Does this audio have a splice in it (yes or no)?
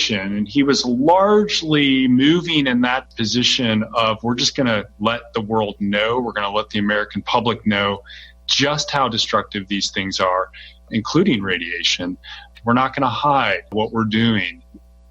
yes